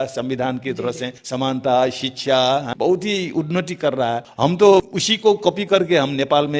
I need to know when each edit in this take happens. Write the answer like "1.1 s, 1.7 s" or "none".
1.1 s, 2.7 s, 4.3 s, 5.0 s

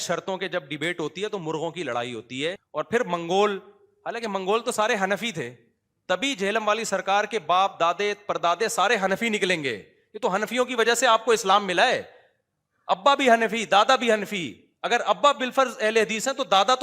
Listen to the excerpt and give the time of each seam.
2.6 s

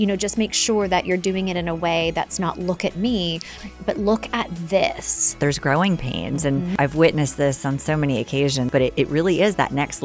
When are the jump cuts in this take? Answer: 5.4 s, 6.7 s, 8.7 s

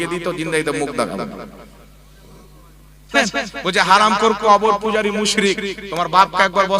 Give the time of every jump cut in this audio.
3.1 s

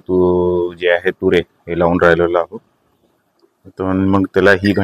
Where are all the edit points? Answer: none

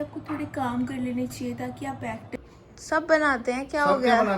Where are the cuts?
2.2 s

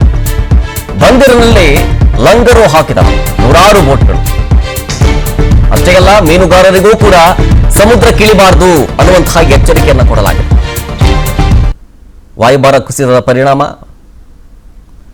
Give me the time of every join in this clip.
none

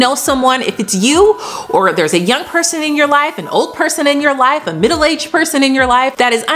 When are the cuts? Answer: none

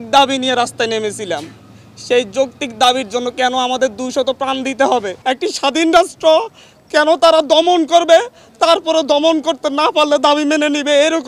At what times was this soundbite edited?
5.1 s

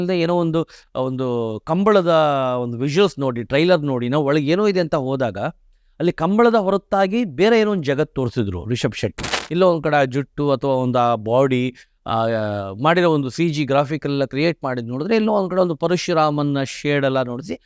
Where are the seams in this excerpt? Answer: 9.3 s

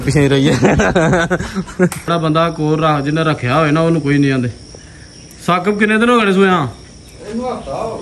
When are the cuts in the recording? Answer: 2.1 s

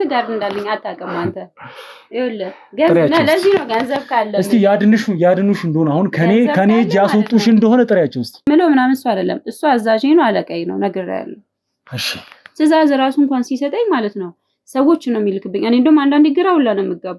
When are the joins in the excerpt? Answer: 8.5 s

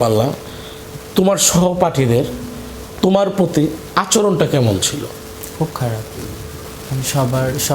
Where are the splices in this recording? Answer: 6.6 s

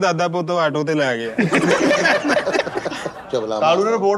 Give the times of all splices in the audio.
3.1 s

